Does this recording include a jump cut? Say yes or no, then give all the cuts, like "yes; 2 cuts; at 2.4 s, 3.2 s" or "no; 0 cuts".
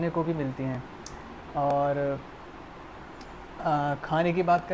no; 0 cuts